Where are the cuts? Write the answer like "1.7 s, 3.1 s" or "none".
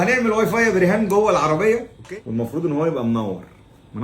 1.9 s